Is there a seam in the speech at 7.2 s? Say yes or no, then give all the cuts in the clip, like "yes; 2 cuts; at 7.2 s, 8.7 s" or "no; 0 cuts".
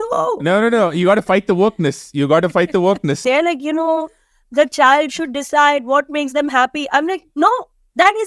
no; 1 cut; at 3.2 s